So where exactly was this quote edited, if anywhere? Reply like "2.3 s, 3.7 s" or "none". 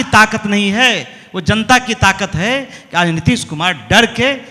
none